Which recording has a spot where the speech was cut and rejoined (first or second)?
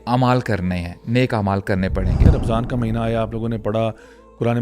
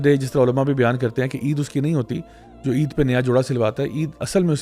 first